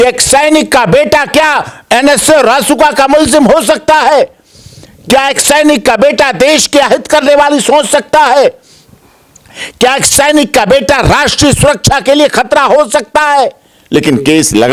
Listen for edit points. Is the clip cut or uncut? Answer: uncut